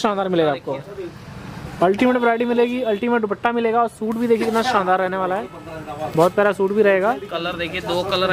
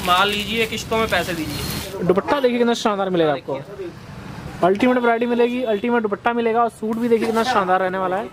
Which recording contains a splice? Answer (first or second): second